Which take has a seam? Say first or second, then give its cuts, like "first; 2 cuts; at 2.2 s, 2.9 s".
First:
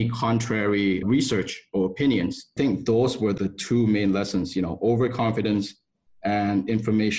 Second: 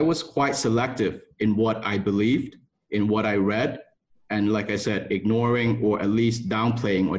first; 3 cuts; at 1.0 s, 2.5 s, 3.4 s